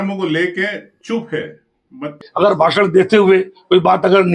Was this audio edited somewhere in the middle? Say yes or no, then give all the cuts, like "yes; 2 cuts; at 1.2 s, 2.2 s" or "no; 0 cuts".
yes; 1 cut; at 2.2 s